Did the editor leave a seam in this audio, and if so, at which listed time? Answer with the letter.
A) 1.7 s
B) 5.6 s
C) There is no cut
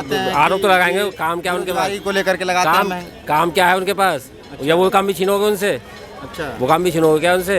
C